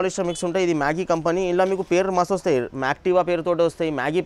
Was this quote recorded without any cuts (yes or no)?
yes